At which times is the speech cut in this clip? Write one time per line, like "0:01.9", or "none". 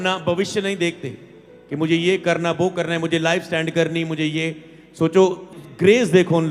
0:05.5